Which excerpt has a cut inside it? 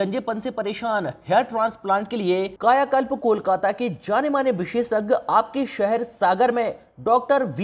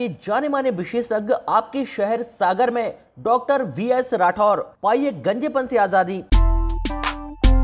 second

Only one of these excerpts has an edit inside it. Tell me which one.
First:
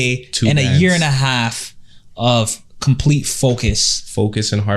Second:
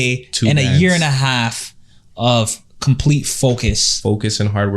second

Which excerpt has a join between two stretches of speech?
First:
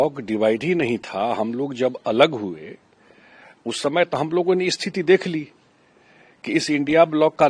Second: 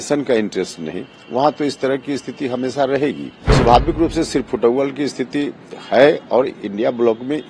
second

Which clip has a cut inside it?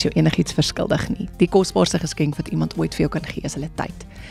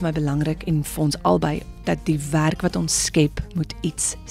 second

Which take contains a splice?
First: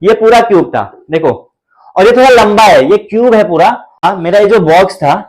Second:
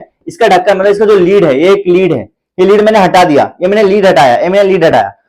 first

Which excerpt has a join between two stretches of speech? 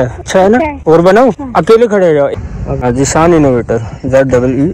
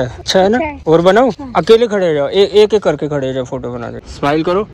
first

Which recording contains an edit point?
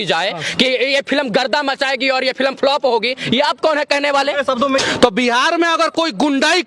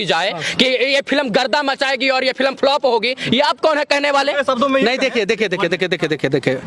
first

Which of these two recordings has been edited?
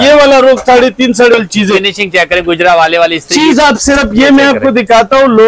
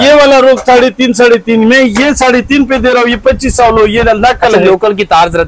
first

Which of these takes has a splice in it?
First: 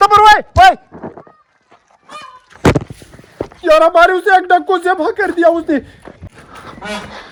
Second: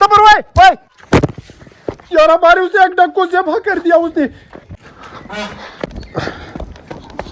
second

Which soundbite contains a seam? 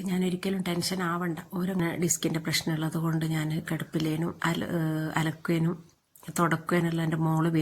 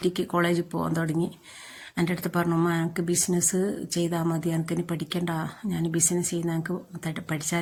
first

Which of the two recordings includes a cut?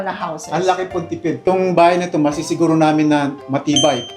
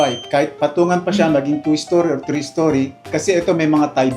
first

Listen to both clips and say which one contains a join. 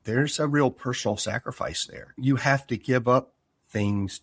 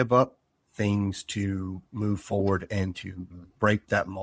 first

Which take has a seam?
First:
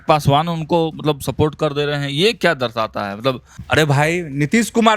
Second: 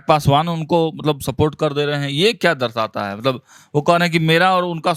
first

